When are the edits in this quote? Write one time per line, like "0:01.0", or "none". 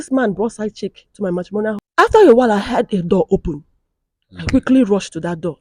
0:01.8